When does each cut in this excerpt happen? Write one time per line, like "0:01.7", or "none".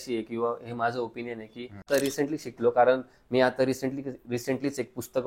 0:01.8